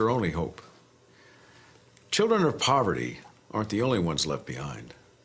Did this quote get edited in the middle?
no; 0 cuts

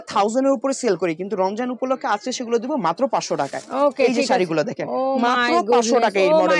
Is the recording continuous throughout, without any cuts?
yes; 0 cuts

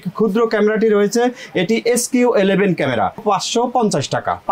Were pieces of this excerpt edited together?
yes; 1 cut; at 3.2 s

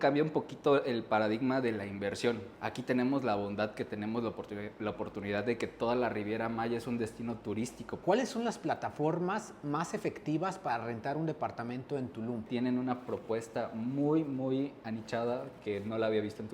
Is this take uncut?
no; 3 cuts; at 2.5 s, 8.0 s, 12.4 s

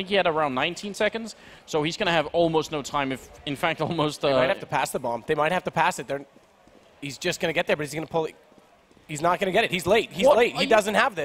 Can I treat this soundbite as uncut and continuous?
yes; 0 cuts

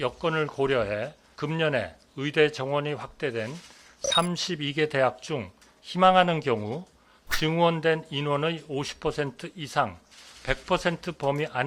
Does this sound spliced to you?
yes; 1 cut; at 1.2 s

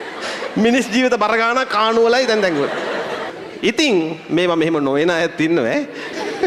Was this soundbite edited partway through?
yes; 1 cut; at 3.4 s

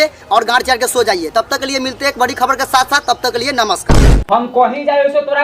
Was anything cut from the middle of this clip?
yes; 1 cut; at 4.2 s

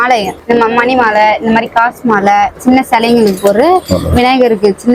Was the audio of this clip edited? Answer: no; 0 cuts

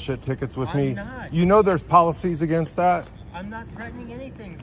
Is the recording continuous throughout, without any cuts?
yes; 0 cuts

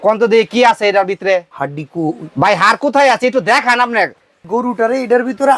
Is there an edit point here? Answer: yes; 2 cuts; at 1.6 s, 4.4 s

